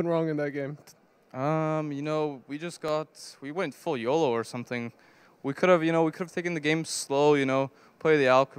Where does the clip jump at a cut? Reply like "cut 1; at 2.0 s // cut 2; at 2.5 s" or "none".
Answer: none